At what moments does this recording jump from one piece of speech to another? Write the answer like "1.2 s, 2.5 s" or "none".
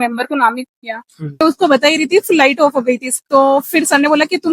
1.4 s

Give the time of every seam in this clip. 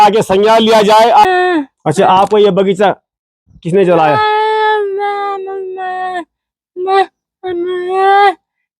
1.2 s

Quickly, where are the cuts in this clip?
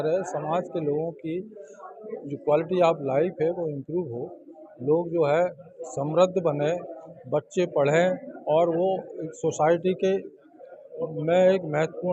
none

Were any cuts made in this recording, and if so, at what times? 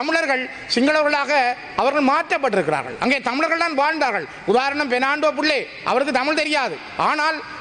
none

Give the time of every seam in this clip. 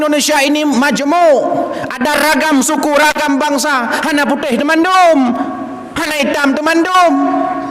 none

